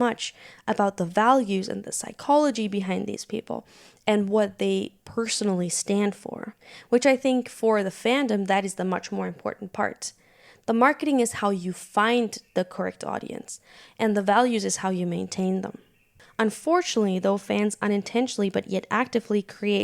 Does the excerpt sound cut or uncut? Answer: cut